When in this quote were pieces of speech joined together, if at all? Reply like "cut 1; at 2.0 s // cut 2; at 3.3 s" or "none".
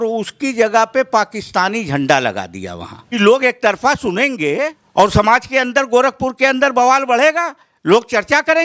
cut 1; at 3.2 s // cut 2; at 4.8 s